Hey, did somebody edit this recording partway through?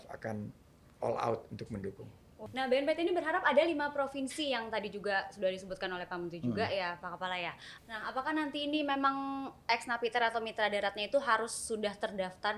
yes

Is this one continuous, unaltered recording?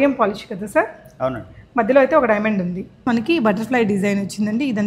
no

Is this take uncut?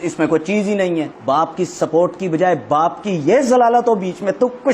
no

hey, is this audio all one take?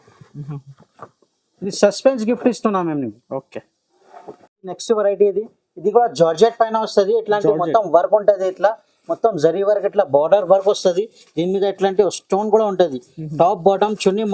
yes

